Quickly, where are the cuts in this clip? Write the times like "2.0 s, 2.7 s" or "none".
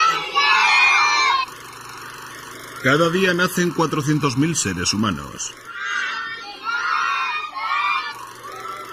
3.5 s